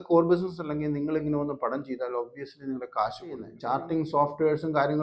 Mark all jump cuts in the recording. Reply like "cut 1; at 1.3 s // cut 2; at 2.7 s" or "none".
cut 1; at 3.6 s